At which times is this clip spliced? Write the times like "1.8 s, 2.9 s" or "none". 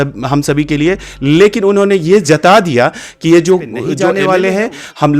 4.0 s